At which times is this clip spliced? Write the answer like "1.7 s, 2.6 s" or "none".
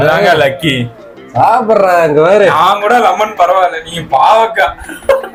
none